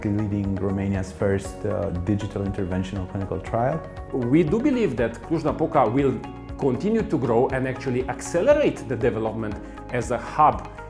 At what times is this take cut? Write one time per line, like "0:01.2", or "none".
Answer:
0:04.1